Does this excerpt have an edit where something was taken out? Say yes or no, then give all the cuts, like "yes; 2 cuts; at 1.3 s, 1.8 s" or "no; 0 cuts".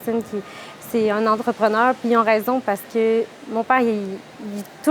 no; 0 cuts